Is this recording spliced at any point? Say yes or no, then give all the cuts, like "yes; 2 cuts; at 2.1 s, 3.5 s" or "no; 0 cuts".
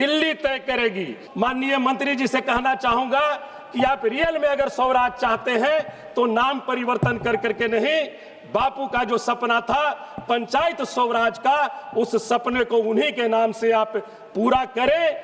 yes; 1 cut; at 1.2 s